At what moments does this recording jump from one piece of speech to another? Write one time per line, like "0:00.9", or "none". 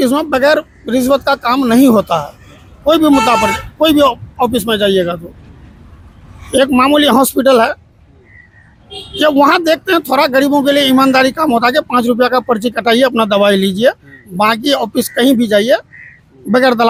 none

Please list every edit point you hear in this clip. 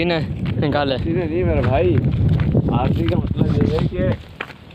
none

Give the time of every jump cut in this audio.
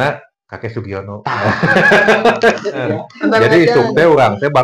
0:02.9

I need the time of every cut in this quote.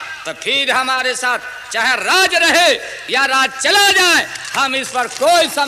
none

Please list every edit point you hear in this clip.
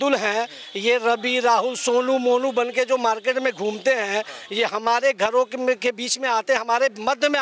none

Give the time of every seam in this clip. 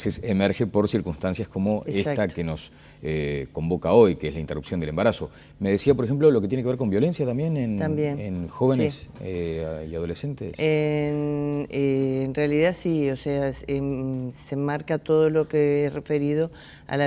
0:00.9

